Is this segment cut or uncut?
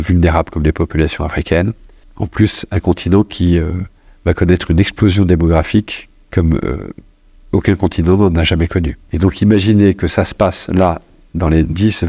cut